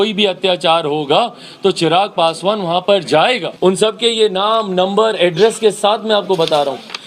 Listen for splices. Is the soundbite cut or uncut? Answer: cut